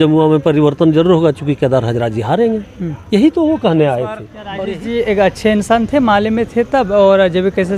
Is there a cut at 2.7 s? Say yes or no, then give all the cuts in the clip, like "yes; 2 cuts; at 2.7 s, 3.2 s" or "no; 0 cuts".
no; 1 cut; at 4.4 s